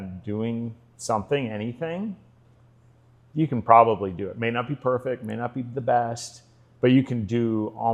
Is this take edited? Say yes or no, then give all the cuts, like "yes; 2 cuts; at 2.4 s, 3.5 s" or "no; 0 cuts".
no; 0 cuts